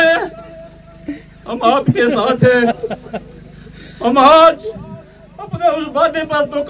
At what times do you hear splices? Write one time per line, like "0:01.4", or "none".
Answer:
none

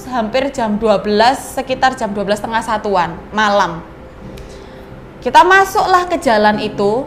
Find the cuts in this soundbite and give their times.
none

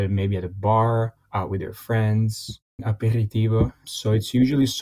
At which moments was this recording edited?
0:01.2
0:02.8
0:03.8

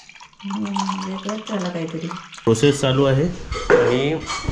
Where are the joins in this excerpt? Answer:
0:02.5

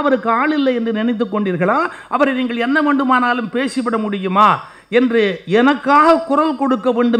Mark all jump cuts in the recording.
none

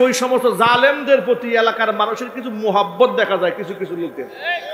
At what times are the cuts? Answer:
none

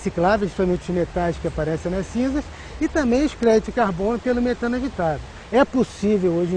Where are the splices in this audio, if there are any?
0:05.3

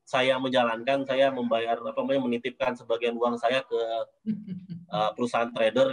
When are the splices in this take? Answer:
none

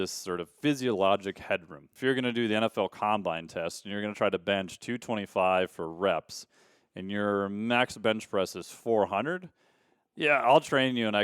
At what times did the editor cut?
0:01.8

